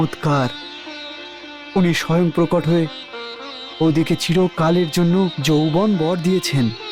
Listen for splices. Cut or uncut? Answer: uncut